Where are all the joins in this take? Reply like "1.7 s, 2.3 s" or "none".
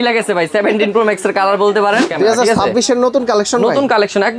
2.1 s